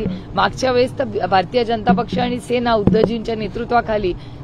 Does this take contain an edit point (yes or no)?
no